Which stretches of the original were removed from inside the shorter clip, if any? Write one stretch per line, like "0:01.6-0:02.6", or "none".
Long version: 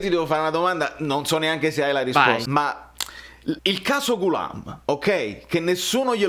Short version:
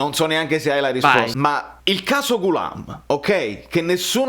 0:02.9-0:03.6